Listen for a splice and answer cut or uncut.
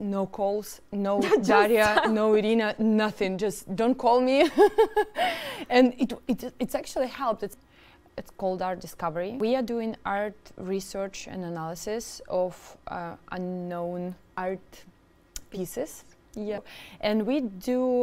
cut